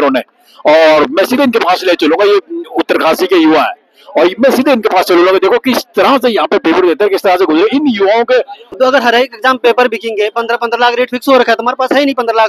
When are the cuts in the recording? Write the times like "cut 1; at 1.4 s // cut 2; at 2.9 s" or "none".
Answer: cut 1; at 8.6 s